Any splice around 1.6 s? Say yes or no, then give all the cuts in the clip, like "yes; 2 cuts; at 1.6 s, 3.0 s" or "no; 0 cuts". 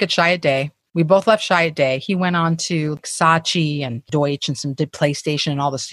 no; 2 cuts; at 3.0 s, 4.0 s